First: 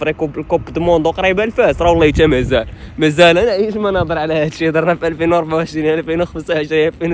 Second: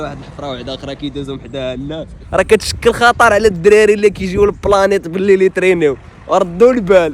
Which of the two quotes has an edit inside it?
second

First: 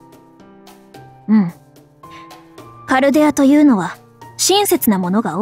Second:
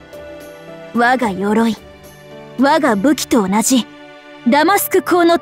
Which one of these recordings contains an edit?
second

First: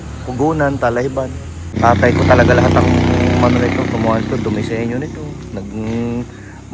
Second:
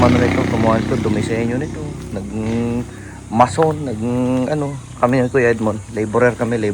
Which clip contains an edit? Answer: first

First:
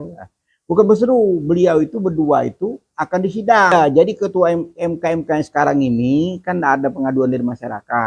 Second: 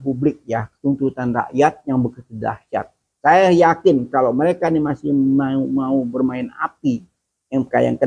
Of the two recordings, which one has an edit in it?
first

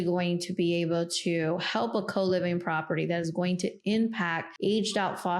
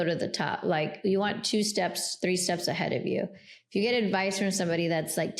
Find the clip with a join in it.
first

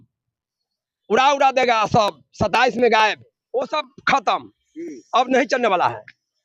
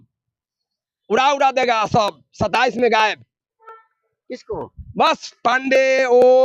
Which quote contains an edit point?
first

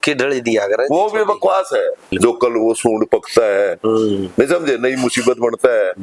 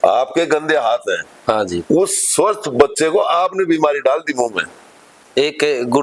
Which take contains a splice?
first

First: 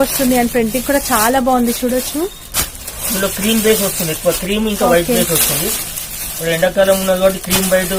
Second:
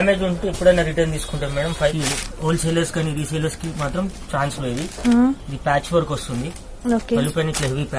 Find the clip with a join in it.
second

